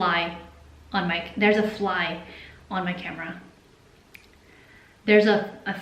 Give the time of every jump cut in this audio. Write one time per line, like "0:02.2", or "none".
none